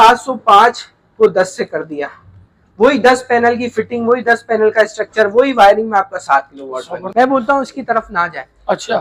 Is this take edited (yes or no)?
yes